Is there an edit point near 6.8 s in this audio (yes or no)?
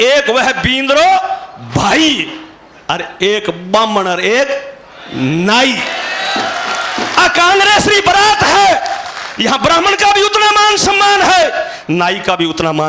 no